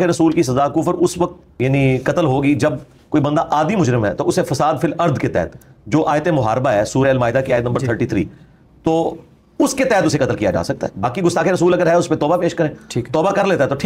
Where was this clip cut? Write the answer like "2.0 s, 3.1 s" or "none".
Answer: 1.4 s